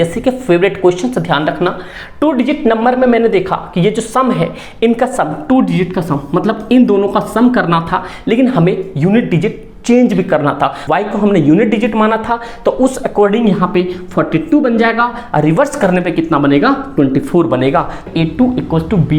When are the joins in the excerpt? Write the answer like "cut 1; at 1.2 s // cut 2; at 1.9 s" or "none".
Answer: cut 1; at 10.8 s // cut 2; at 18.0 s